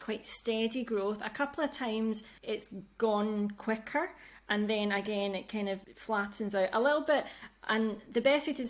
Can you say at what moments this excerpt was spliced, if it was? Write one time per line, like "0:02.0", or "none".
0:02.3
0:05.9